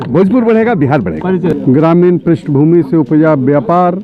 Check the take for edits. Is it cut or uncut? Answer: cut